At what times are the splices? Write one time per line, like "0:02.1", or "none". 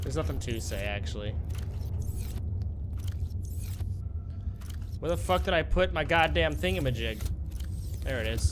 none